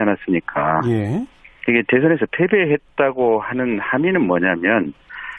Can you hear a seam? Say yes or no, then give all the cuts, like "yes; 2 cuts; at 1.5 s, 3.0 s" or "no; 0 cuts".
no; 0 cuts